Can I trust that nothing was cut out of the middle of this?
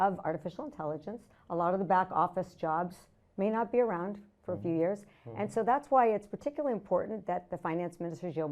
yes; 0 cuts

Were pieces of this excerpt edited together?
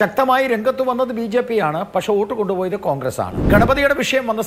yes; 1 cut; at 3.4 s

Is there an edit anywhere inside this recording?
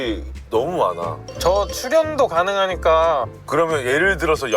yes; 2 cuts; at 1.2 s, 3.3 s

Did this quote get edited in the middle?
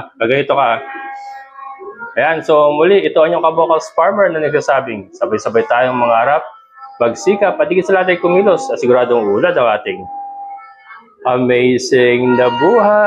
no; 0 cuts

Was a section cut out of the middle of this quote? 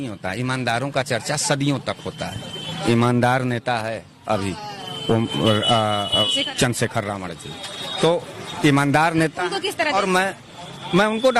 no; 0 cuts

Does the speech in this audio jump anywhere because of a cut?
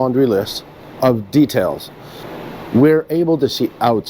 yes; 1 cut; at 2.3 s

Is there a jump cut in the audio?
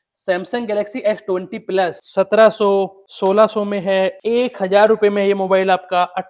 yes; 3 cuts; at 2.0 s, 3.0 s, 4.2 s

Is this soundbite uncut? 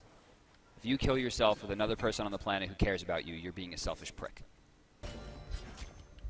no; 1 cut; at 5.0 s

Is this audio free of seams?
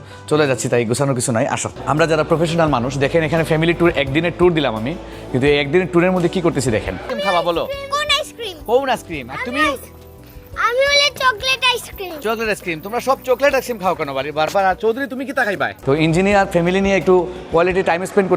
no; 3 cuts; at 1.7 s, 7.1 s, 15.7 s

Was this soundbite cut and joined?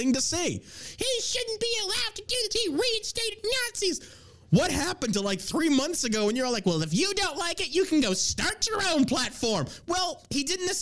no; 0 cuts

